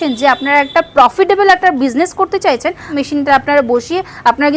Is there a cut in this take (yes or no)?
yes